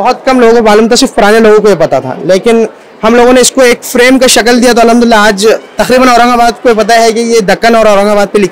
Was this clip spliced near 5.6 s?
no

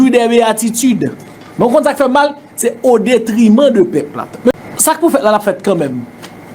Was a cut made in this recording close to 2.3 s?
no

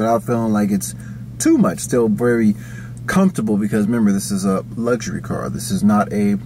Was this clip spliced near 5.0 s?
no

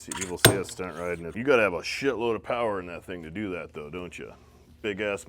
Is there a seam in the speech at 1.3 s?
yes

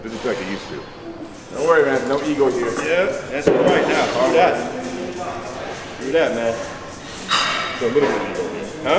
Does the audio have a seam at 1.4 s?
yes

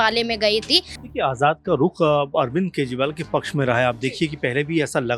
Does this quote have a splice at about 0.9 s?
yes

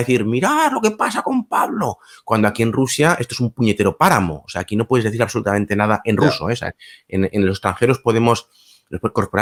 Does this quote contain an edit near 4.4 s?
no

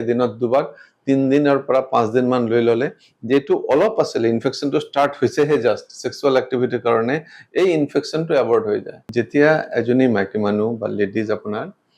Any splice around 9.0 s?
yes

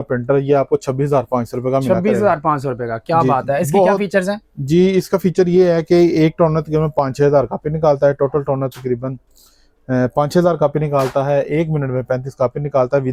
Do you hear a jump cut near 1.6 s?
no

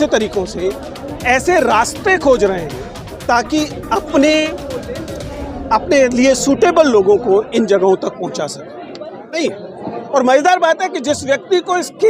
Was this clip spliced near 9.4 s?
yes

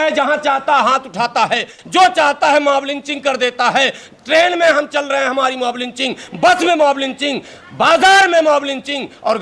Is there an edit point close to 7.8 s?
no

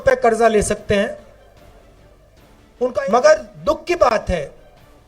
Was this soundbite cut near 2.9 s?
yes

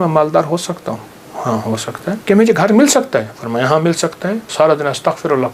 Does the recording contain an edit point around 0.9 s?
no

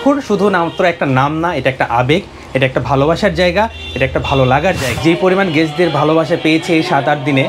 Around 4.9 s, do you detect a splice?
yes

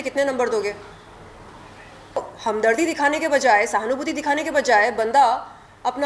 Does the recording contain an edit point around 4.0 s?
no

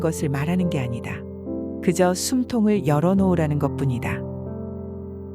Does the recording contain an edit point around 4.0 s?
yes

